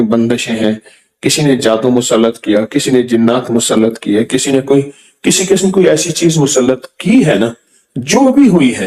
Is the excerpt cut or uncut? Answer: uncut